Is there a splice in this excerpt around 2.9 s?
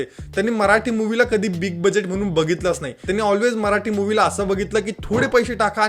yes; 1 cut; at 2.9 s

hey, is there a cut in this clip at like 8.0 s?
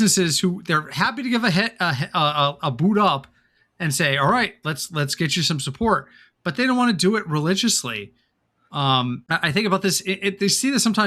no; 1 cut; at 9.2 s

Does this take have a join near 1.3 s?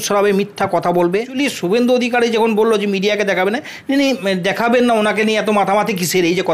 yes; 1 cut; at 1.3 s

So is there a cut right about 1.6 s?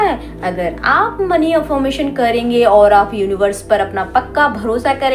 no; 0 cuts

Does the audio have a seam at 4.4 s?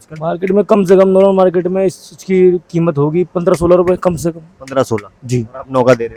no; 0 cuts

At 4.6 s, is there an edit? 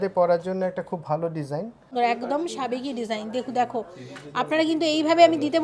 no; 1 cut; at 1.9 s

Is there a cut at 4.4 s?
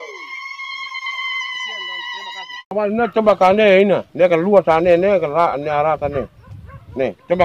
no; 1 cut; at 2.7 s

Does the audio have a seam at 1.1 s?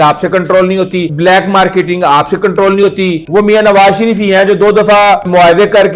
yes; 2 cuts; at 1.1 s, 3.2 s

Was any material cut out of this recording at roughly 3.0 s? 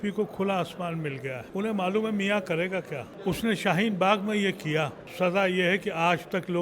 yes; 3 cuts; at 1.4 s, 3.0 s, 5.0 s

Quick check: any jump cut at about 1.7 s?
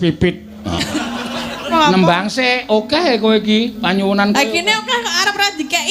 yes; 1 cut; at 1.7 s

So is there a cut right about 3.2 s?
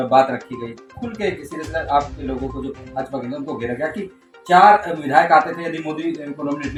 no; 0 cuts

